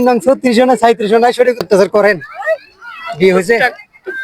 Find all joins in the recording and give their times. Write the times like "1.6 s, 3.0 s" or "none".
1.6 s